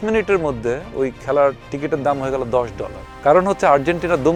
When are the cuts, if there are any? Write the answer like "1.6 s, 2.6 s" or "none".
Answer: none